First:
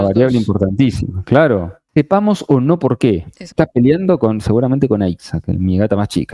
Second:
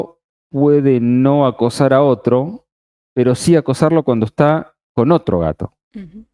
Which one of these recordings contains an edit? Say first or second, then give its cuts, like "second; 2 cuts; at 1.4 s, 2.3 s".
first; 2 cuts; at 1.8 s, 3.5 s